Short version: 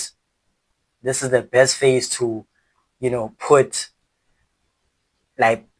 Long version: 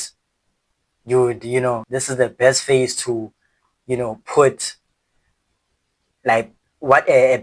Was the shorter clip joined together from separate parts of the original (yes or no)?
yes